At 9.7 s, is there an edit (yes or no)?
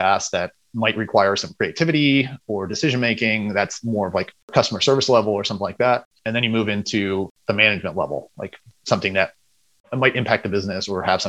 yes